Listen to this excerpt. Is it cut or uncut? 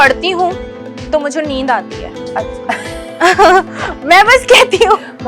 uncut